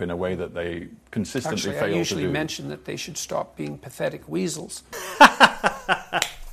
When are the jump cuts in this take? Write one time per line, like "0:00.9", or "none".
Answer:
none